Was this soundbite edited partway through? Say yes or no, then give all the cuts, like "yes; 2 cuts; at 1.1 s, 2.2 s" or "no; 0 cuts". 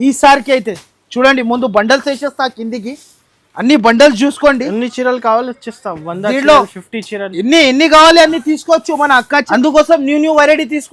yes; 1 cut; at 9.4 s